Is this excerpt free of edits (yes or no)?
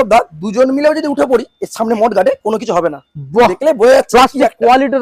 yes